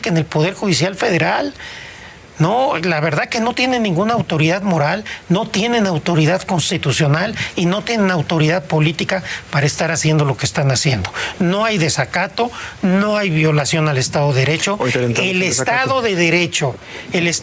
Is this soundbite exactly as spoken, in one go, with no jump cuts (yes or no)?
yes